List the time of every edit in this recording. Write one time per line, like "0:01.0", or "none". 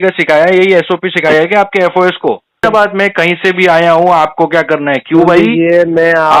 0:02.6